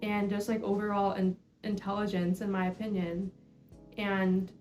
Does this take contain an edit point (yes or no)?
no